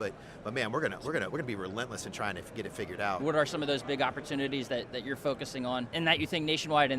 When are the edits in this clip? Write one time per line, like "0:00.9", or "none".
0:03.2
0:05.9